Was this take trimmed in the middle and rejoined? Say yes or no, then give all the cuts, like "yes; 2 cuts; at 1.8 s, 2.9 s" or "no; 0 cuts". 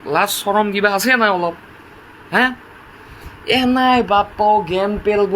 no; 0 cuts